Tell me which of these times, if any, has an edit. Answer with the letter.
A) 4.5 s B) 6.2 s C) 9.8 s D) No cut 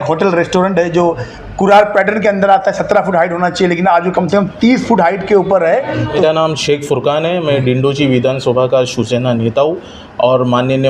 B